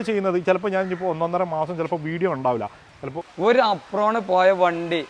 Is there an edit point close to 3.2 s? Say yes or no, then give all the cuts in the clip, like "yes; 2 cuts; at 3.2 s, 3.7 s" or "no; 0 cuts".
yes; 1 cut; at 3.2 s